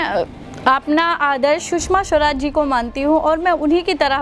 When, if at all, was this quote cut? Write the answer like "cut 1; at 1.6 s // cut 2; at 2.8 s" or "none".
none